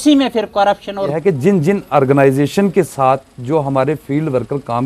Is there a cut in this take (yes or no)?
yes